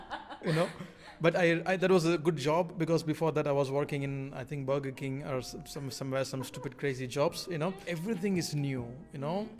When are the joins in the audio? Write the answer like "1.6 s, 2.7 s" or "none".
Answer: 7.8 s

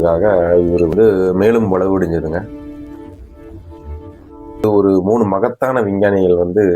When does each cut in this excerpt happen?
4.6 s

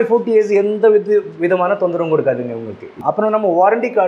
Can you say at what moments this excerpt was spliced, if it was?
2.9 s

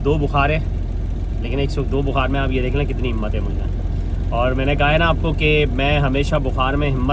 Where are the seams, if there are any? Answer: none

